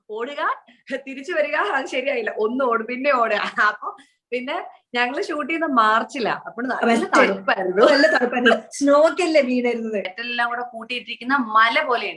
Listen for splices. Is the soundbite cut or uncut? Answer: cut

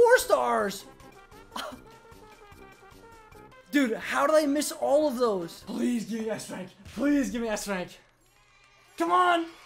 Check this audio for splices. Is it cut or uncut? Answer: cut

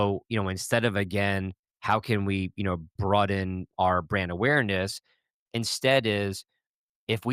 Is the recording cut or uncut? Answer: cut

